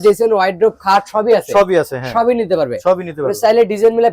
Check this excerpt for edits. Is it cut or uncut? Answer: uncut